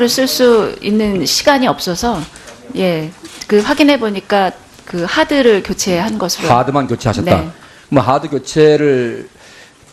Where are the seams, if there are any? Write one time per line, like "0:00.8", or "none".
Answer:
0:07.6